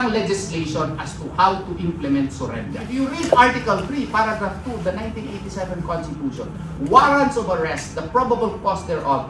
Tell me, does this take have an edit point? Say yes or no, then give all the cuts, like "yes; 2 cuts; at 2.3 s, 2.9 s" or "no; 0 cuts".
yes; 1 cut; at 2.8 s